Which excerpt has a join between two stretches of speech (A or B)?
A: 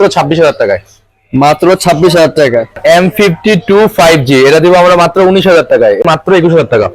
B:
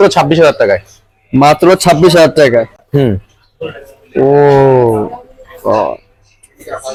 A